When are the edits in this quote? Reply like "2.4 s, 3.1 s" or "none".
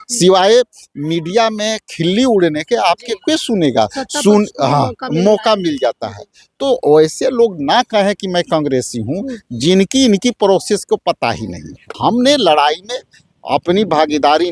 11.8 s

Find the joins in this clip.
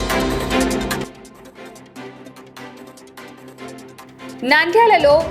1.0 s, 4.4 s

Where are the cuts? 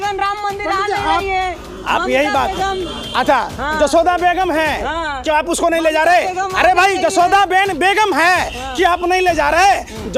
none

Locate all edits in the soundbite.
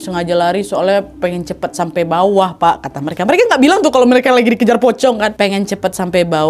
5.3 s

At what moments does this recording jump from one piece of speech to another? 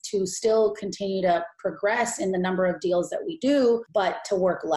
3.9 s

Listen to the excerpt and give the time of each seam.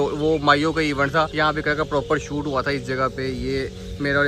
none

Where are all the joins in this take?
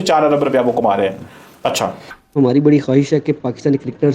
2.1 s

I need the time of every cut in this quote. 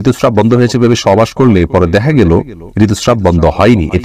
none

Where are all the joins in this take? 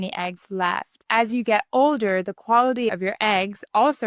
0.9 s

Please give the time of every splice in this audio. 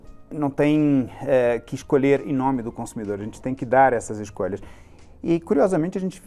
none

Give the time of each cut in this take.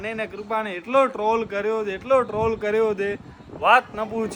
none

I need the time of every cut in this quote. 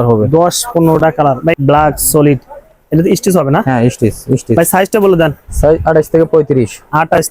1.5 s, 4.6 s

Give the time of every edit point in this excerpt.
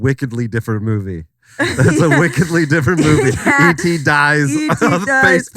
none

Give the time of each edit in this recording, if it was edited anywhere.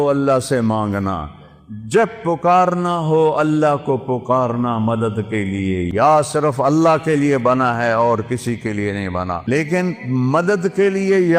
5.9 s, 9.5 s

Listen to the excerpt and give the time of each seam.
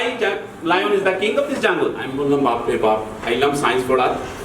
2.1 s

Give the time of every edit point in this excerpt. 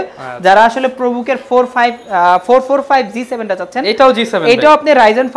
none

